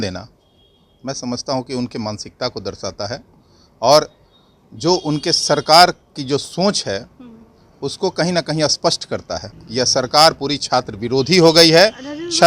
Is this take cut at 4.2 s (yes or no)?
no